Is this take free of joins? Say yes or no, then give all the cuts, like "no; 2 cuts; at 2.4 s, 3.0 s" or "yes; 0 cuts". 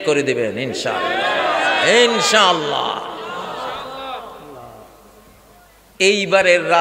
yes; 0 cuts